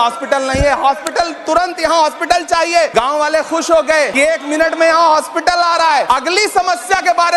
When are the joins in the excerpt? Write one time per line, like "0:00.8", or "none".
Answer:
0:02.9
0:04.2
0:06.1